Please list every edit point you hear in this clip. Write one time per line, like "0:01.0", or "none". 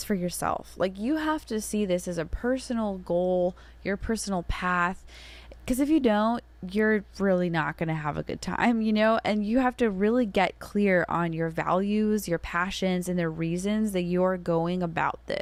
none